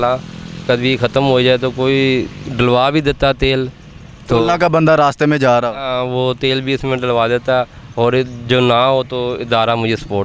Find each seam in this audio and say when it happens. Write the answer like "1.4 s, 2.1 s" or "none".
none